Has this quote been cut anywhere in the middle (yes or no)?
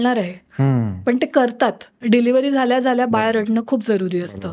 yes